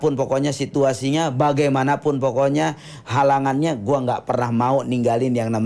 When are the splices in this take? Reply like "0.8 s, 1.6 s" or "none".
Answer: none